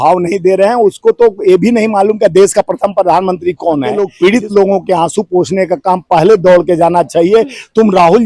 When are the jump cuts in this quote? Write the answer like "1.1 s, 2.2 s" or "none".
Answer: 4.0 s